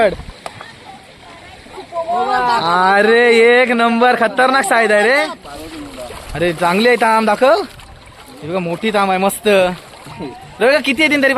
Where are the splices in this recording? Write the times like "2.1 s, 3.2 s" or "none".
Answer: 5.4 s